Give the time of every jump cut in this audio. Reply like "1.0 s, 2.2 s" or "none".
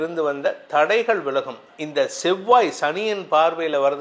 1.6 s